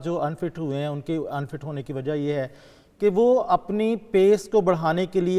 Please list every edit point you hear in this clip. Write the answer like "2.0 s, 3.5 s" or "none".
none